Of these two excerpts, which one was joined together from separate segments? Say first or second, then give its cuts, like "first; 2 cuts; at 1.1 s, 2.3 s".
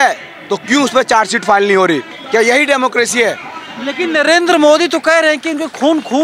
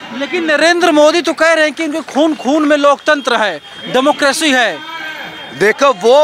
first; 1 cut; at 2.2 s